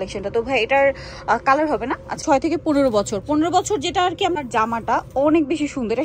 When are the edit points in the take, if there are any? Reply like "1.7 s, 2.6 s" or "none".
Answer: 2.2 s, 4.4 s